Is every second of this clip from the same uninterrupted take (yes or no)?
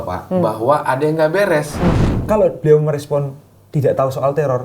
no